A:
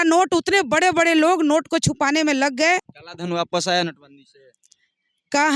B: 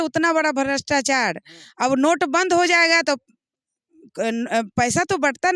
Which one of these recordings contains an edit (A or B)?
A